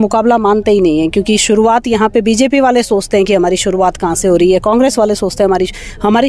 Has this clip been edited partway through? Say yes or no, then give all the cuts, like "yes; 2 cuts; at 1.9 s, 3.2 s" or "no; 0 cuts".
no; 0 cuts